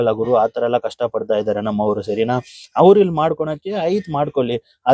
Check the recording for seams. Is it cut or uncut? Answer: uncut